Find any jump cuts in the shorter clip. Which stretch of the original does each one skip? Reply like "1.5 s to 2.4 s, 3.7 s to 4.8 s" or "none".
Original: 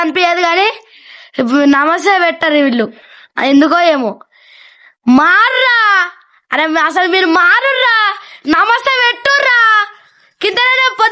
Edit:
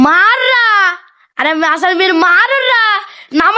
none